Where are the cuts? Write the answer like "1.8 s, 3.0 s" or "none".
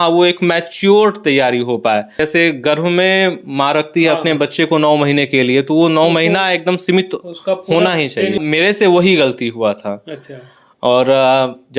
2.2 s, 8.4 s